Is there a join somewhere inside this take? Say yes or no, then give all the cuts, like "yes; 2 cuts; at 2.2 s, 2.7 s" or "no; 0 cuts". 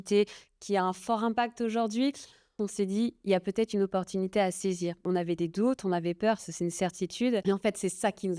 yes; 3 cuts; at 2.6 s, 5.0 s, 7.4 s